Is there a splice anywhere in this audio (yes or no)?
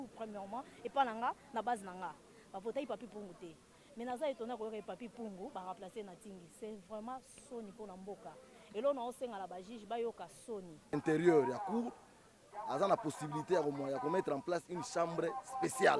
yes